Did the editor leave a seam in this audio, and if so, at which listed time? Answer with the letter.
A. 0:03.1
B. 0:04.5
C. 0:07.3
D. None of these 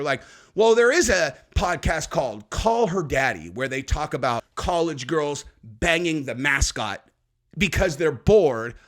B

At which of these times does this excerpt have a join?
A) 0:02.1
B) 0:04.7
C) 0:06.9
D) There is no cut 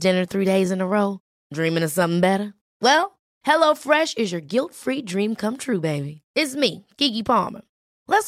D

